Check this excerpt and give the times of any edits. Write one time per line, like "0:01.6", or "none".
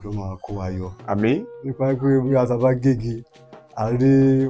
0:01.4